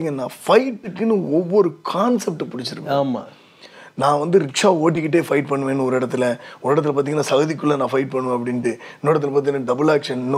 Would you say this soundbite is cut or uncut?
uncut